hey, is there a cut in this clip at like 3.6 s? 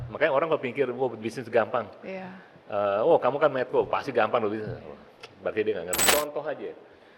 no; 1 cut; at 6.0 s

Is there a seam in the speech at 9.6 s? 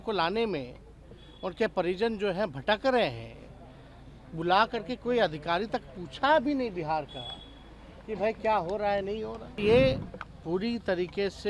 yes; 1 cut; at 9.6 s

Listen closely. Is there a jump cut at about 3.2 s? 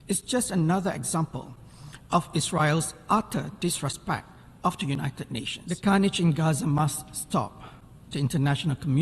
no; 1 cut; at 5.6 s

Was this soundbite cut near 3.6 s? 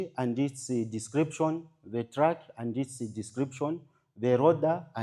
no; 0 cuts

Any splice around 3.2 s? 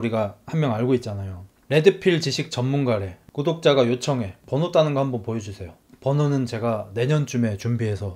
yes; 1 cut; at 3.2 s

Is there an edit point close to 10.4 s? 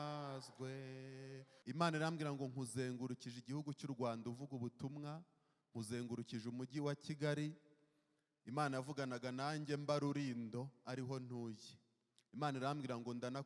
no; 1 cut; at 1.5 s

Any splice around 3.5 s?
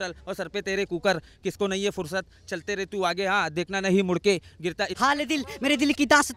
no; 1 cut; at 4.9 s

